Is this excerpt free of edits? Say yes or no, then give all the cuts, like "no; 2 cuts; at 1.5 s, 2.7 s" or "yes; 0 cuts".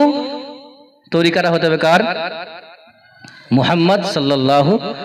yes; 0 cuts